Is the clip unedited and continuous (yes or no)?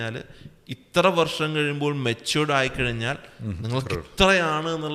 yes